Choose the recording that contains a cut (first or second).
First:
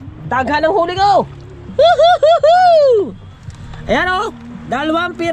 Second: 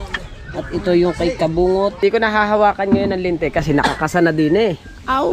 second